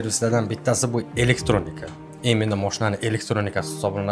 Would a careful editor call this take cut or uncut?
uncut